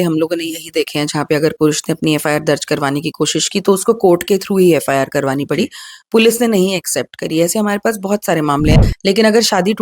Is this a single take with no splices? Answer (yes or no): no